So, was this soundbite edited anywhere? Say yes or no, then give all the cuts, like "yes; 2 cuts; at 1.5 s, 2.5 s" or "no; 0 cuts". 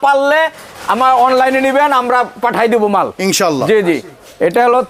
no; 0 cuts